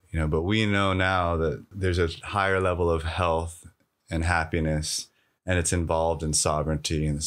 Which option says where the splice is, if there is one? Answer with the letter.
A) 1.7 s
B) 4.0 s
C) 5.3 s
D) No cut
A